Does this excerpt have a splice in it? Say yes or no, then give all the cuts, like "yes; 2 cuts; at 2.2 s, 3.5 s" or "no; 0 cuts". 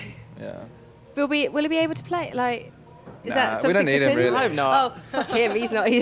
yes; 1 cut; at 0.9 s